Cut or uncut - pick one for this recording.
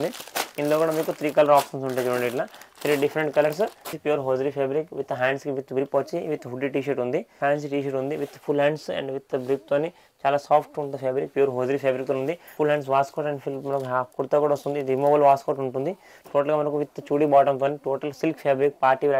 cut